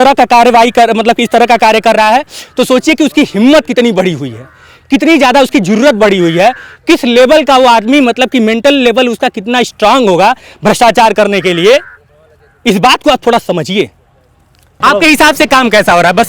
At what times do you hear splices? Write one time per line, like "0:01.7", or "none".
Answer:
0:14.8